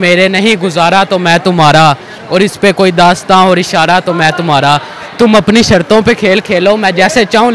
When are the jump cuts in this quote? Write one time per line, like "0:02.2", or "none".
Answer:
none